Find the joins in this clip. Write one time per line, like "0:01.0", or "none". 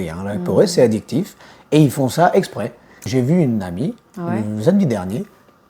0:03.0

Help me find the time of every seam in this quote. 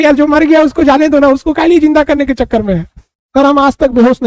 0:03.2

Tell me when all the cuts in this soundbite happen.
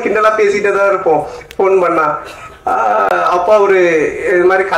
none

